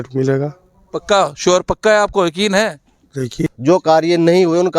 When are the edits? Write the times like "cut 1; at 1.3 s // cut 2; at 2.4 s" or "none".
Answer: cut 1; at 3.5 s